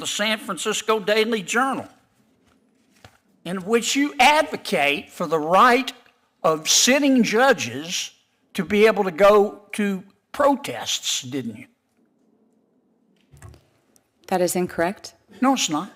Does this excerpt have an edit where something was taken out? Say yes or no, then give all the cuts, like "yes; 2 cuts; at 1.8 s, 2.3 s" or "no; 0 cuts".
no; 0 cuts